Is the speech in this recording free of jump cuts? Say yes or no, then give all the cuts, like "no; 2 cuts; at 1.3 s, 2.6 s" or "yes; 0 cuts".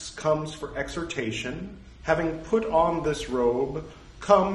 no; 1 cut; at 1.9 s